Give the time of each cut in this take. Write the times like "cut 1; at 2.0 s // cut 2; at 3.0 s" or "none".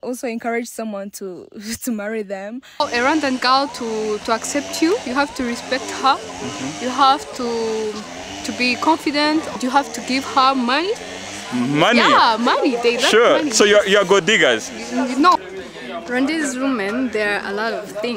cut 1; at 2.8 s // cut 2; at 9.5 s // cut 3; at 15.4 s